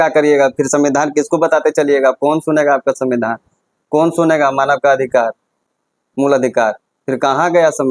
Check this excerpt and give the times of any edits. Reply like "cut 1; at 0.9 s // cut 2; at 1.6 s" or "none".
none

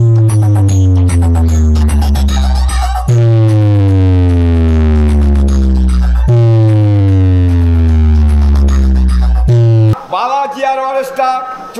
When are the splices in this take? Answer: cut 1; at 9.9 s

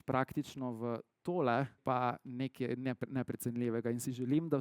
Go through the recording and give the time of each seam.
cut 1; at 1.8 s

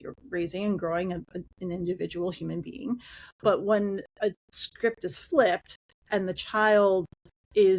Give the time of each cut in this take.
cut 1; at 4.5 s

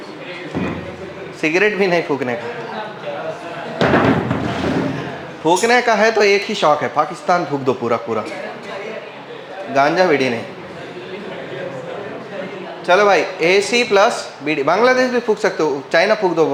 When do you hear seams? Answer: none

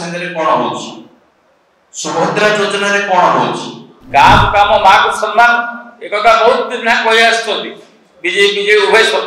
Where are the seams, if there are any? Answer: cut 1; at 3.9 s

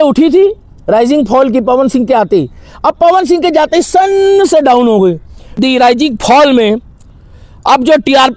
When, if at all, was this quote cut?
cut 1; at 5.5 s

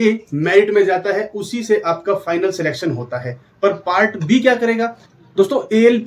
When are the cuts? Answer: cut 1; at 5.1 s

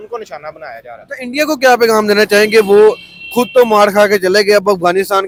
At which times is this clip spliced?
none

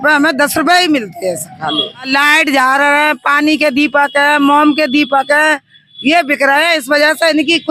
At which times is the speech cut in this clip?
cut 1; at 2.1 s

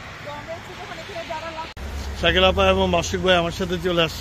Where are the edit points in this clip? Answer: cut 1; at 1.8 s

